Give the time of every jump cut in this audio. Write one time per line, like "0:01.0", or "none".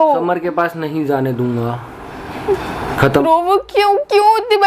0:03.2